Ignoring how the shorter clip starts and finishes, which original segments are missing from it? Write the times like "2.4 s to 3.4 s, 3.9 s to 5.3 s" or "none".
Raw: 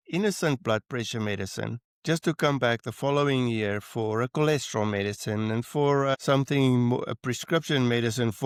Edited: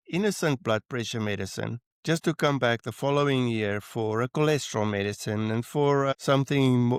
none